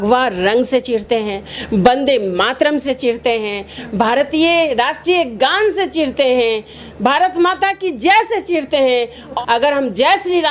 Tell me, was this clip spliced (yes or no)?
no